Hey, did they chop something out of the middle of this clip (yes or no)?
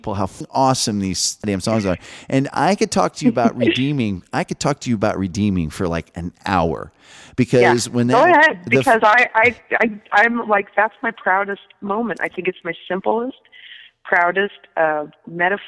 no